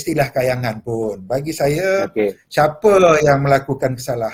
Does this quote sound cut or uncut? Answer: uncut